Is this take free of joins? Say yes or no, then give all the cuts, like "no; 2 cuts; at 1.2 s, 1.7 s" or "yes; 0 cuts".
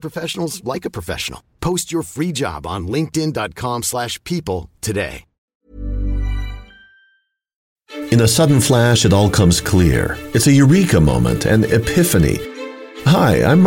no; 2 cuts; at 5.5 s, 7.8 s